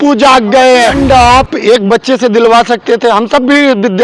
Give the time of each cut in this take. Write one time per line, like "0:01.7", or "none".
0:01.0